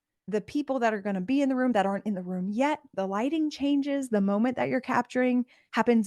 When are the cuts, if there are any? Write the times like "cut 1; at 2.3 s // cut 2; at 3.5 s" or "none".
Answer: cut 1; at 2.9 s